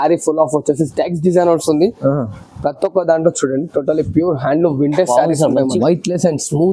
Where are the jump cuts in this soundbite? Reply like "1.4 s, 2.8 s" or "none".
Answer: 5.7 s

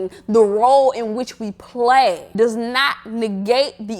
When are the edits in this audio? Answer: 2.2 s

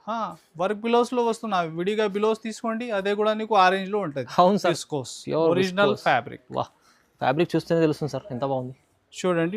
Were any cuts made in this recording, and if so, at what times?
4.8 s

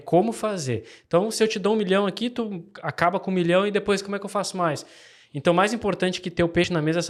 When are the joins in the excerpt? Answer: none

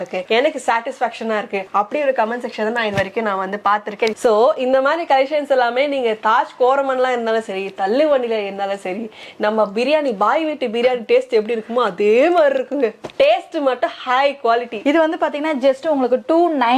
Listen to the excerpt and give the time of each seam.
4.2 s, 14.8 s

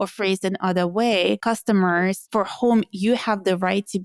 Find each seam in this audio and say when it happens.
1.4 s, 2.2 s

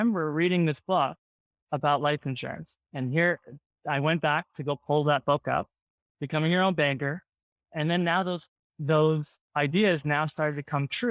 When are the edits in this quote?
none

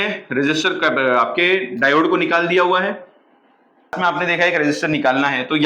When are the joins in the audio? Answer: 4.0 s

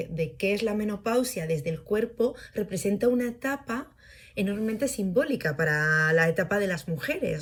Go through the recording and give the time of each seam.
none

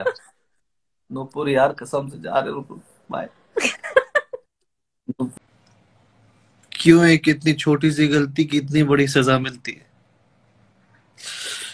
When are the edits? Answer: 5.3 s

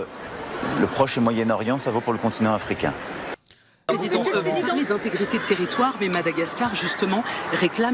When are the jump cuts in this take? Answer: 3.9 s

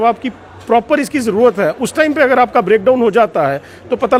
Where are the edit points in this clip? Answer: none

